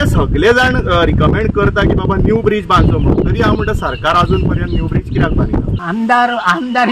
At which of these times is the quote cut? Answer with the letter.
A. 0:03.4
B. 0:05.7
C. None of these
B